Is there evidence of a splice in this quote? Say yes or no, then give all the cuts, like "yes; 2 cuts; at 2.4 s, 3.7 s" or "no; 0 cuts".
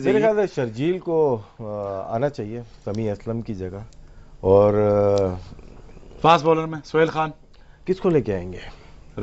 no; 0 cuts